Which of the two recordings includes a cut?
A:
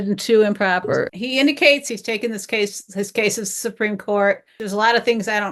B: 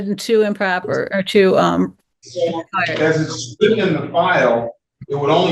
A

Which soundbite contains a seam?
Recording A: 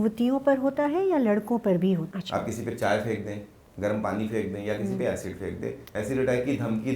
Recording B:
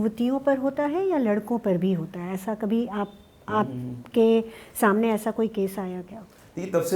A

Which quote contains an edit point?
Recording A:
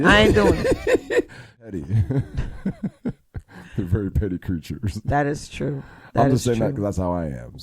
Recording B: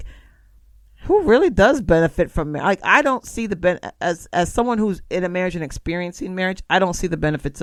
A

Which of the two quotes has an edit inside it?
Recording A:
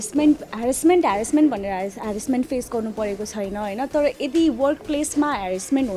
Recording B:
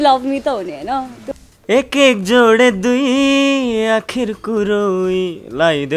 B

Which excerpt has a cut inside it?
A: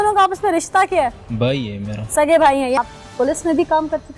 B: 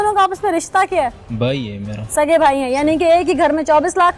A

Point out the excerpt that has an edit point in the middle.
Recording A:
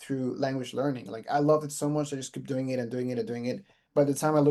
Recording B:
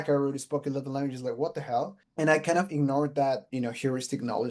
B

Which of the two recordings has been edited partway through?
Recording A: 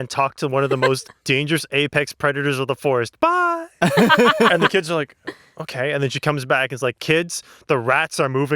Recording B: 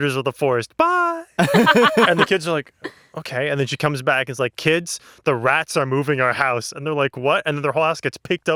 A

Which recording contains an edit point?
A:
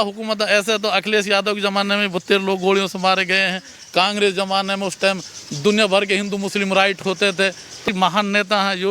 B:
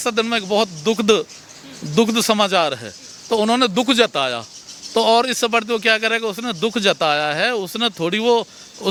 A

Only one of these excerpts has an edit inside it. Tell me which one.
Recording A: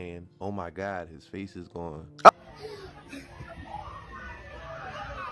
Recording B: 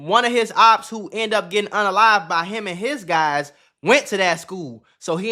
A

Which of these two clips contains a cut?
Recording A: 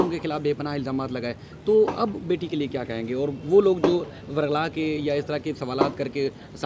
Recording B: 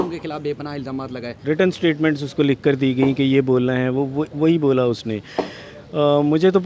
B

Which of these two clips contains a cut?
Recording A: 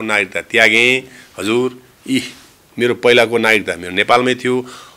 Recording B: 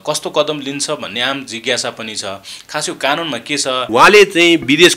B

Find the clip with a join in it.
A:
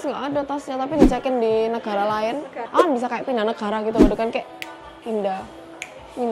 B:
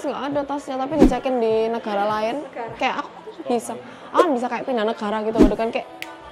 A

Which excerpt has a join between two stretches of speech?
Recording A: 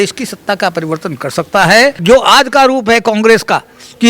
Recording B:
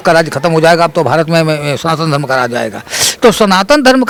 A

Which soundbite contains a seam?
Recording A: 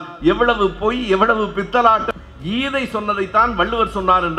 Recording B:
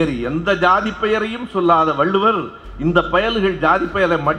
A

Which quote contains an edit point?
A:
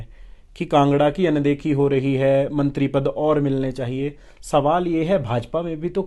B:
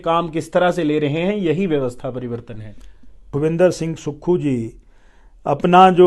B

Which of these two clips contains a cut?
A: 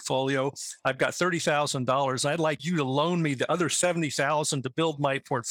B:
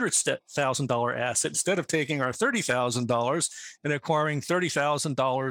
A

